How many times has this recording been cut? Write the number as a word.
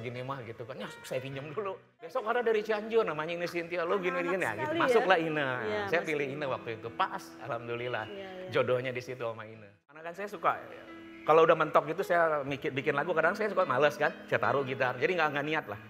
two